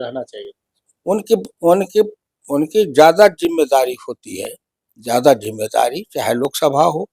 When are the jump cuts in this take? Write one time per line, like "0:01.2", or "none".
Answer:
none